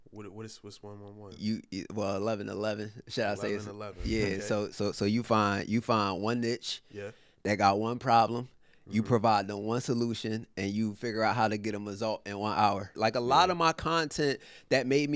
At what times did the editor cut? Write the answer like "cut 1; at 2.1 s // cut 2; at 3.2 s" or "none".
cut 1; at 12.9 s

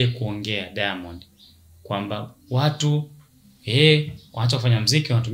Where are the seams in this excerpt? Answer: none

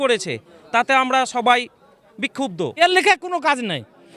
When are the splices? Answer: cut 1; at 2.8 s

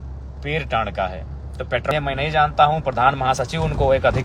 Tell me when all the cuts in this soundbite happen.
cut 1; at 1.8 s

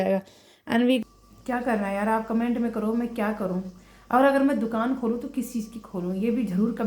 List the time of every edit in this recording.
cut 1; at 1.0 s

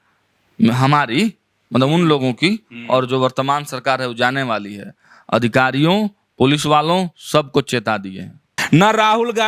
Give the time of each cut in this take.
cut 1; at 8.5 s

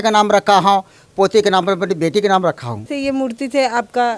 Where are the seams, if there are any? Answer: cut 1; at 2.9 s

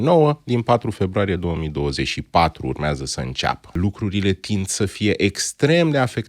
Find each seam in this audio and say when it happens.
cut 1; at 3.8 s

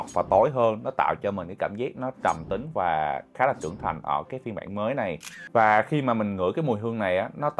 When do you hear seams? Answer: none

